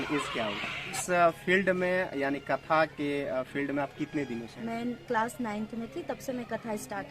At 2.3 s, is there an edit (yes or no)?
no